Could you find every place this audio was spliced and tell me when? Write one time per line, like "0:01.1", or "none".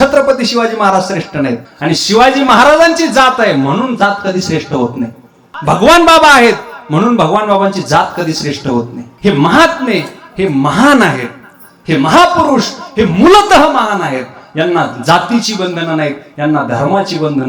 0:01.7
0:05.5
0:09.1